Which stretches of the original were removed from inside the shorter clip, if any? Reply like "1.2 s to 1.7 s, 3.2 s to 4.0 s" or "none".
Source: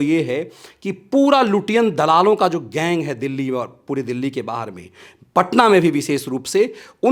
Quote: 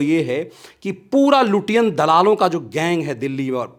none